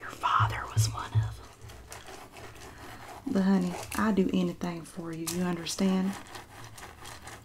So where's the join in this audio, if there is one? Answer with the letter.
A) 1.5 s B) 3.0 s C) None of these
A